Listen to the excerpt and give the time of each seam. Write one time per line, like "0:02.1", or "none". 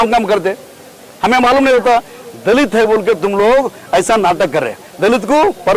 none